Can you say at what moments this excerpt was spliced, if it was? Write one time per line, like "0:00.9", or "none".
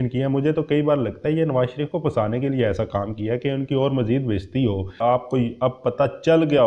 0:05.0